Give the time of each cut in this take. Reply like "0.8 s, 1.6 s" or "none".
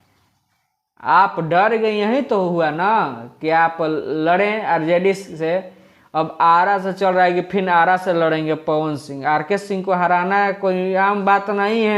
none